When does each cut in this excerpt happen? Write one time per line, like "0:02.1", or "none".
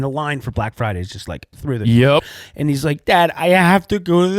0:02.2